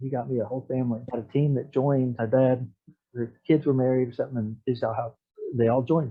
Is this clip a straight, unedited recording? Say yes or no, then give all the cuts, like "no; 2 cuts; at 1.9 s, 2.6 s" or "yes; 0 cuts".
yes; 0 cuts